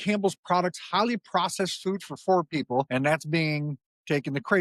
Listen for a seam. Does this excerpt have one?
yes; 1 cut; at 2.9 s

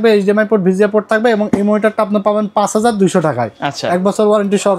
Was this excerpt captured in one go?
yes; 0 cuts

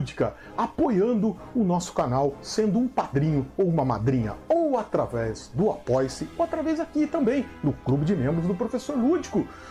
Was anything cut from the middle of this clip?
no; 0 cuts

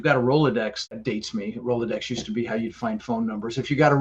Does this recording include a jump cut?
yes; 1 cut; at 1.0 s

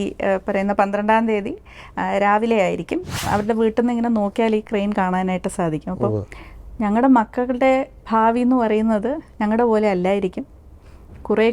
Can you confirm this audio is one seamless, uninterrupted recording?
no; 1 cut; at 3.2 s

